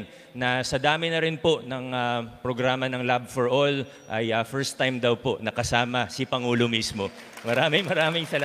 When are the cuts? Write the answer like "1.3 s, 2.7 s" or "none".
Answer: none